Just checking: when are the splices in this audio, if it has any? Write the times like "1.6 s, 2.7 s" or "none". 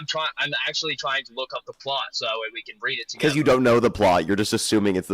none